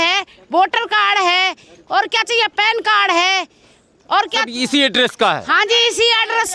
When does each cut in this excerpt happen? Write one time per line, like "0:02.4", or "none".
none